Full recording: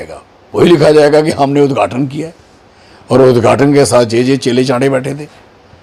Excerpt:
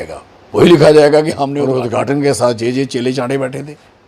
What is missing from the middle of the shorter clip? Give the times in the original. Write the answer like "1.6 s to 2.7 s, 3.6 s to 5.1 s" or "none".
1.5 s to 3.0 s